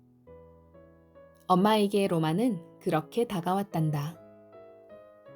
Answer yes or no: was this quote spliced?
yes